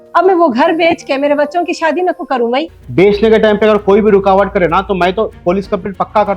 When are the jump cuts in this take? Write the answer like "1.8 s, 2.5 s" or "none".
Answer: 2.8 s